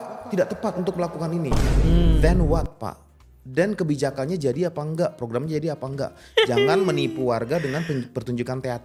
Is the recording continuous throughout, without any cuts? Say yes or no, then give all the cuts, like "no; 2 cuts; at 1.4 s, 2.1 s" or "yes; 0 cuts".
yes; 0 cuts